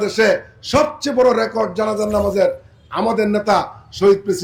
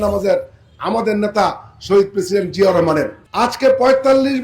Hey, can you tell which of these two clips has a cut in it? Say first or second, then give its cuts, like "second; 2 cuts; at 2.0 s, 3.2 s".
second; 1 cut; at 3.2 s